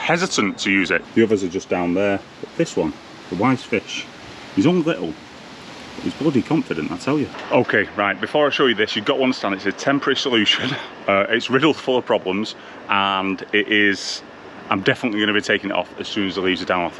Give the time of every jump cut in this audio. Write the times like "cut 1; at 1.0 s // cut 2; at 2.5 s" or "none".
cut 1; at 1.0 s // cut 2; at 7.4 s